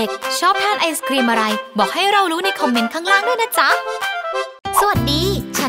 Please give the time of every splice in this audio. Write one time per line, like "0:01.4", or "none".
0:04.6